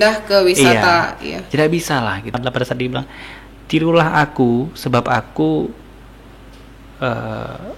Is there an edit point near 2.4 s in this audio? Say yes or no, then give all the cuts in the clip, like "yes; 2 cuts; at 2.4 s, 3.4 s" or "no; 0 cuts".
yes; 1 cut; at 2.4 s